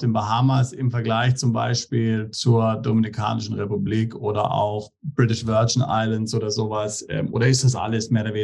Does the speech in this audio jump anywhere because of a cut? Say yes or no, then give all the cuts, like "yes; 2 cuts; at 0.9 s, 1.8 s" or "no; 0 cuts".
no; 0 cuts